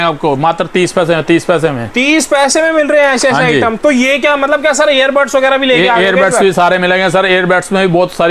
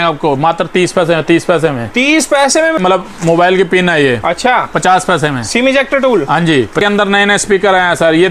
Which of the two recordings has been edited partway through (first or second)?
second